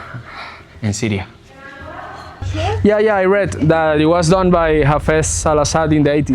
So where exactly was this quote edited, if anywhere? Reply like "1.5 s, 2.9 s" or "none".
2.4 s